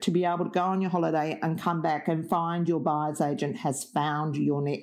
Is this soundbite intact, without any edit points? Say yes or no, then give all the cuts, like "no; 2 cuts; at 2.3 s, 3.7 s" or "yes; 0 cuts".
yes; 0 cuts